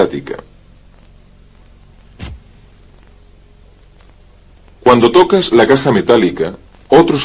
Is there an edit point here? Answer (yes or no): no